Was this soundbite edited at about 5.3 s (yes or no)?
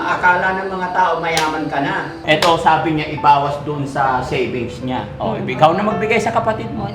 no